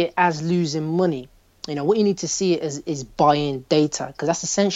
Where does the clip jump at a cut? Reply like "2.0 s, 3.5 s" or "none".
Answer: none